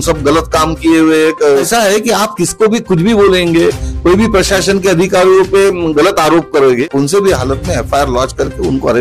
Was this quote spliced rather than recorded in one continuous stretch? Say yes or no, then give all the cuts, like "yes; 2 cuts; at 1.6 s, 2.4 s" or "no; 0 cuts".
yes; 2 cuts; at 1.7 s, 6.8 s